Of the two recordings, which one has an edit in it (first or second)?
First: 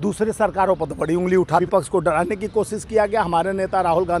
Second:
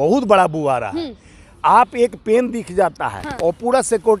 first